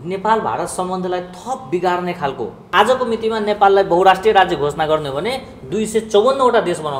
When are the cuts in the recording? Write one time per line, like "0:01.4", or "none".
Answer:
0:02.7